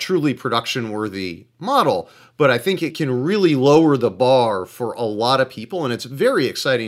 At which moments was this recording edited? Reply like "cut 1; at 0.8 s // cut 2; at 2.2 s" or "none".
none